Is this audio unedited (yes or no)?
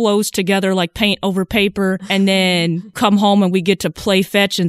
no